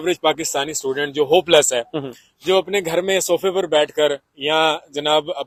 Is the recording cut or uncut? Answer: uncut